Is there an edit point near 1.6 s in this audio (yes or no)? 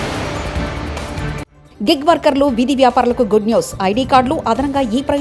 yes